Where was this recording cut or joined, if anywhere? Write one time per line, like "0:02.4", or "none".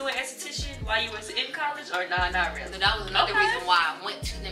0:02.7